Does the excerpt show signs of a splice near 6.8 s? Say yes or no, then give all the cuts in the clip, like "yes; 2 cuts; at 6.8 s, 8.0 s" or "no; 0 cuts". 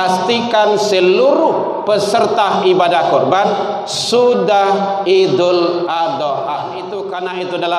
yes; 1 cut; at 6.8 s